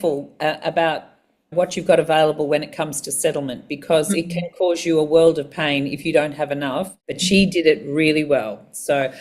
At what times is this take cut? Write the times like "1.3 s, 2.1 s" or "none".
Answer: 7.1 s

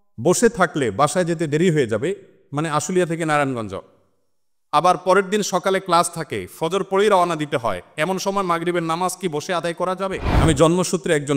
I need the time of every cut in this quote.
10.3 s

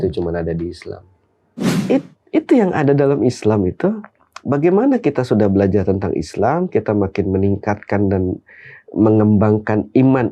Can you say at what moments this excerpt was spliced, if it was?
1.7 s

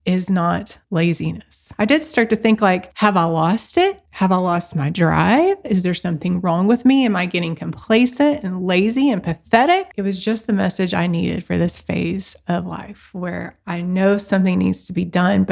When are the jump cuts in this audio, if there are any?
1.7 s, 4.1 s, 9.9 s

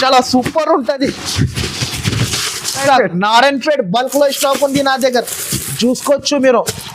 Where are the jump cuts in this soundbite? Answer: 2.8 s

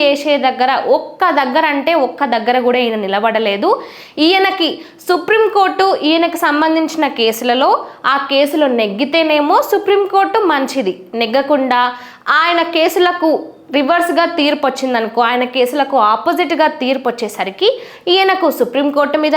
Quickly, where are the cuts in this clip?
none

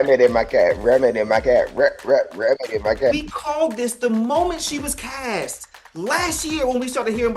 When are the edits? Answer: 3.1 s

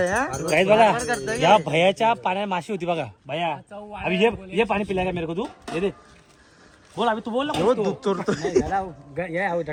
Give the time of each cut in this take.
none

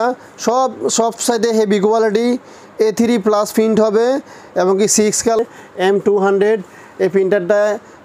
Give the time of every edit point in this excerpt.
5.4 s

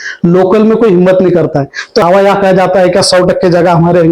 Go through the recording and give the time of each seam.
2.0 s

